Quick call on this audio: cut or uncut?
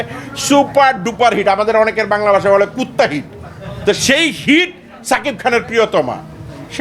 uncut